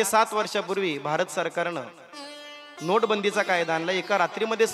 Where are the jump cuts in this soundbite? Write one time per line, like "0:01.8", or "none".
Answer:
none